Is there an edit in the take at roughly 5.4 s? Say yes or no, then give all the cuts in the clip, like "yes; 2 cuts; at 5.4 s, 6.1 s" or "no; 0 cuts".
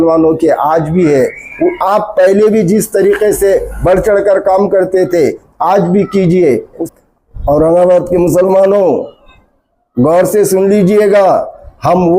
no; 1 cut; at 6.9 s